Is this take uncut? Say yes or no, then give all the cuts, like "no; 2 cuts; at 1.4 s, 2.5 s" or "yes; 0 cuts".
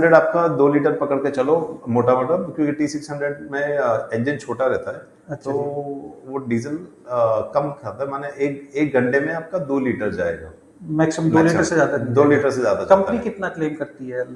yes; 0 cuts